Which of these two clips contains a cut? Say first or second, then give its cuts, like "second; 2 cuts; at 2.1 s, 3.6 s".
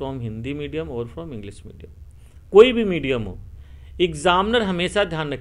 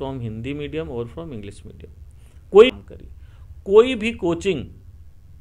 second; 1 cut; at 2.7 s